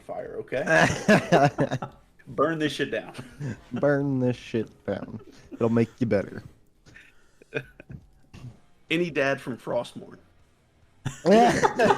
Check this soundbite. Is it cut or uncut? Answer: cut